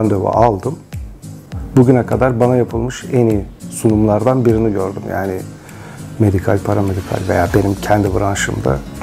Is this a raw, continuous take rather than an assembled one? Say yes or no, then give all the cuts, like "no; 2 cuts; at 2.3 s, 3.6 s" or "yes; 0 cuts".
no; 1 cut; at 1.0 s